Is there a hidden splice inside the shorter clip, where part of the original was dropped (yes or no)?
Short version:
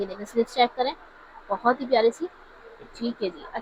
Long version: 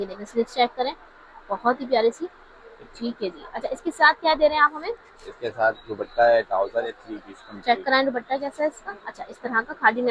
no